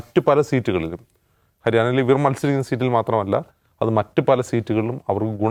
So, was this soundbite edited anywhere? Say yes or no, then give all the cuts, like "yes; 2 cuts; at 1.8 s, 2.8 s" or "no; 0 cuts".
no; 0 cuts